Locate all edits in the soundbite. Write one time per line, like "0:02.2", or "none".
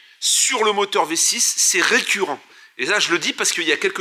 none